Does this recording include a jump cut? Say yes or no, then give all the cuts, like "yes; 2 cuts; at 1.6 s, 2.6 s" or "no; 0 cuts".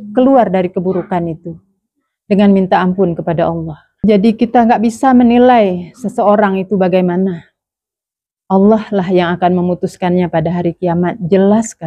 yes; 1 cut; at 3.8 s